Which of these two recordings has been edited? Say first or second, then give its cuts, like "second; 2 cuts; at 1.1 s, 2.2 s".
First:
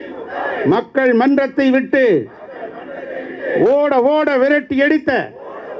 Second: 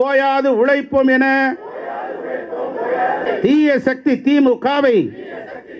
second; 1 cut; at 3.3 s